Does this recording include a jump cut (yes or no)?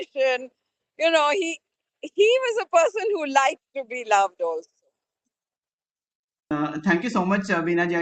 no